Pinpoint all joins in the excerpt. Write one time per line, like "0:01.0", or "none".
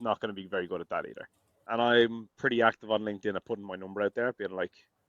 0:01.6